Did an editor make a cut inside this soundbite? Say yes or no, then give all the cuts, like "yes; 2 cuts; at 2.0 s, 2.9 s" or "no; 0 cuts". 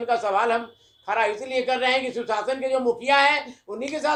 no; 0 cuts